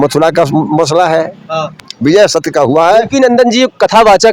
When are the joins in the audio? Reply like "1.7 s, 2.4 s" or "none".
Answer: 1.7 s